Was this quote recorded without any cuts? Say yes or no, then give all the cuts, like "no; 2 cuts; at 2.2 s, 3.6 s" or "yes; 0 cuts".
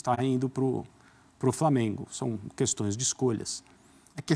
yes; 0 cuts